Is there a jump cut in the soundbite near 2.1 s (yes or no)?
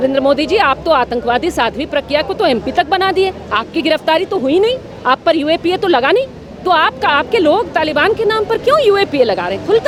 no